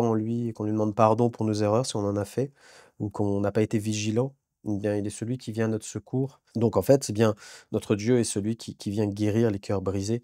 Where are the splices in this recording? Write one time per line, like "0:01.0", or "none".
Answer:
0:06.4